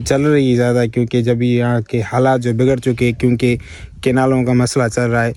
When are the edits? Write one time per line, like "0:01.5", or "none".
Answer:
none